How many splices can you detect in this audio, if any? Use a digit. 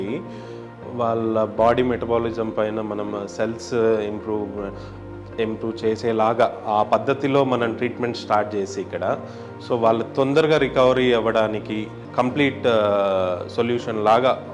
1